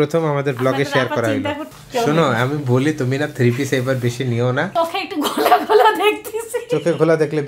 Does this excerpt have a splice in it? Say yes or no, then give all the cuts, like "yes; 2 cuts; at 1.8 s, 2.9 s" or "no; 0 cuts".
yes; 2 cuts; at 1.7 s, 4.7 s